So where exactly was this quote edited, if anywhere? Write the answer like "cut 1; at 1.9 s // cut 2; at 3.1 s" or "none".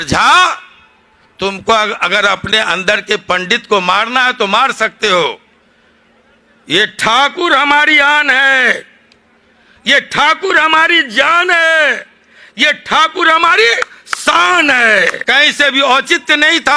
cut 1; at 15.2 s